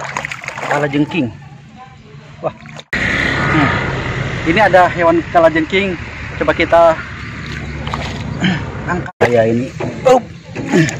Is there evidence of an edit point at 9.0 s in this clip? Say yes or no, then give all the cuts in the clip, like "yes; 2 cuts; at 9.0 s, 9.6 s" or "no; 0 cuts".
yes; 2 cuts; at 2.9 s, 9.0 s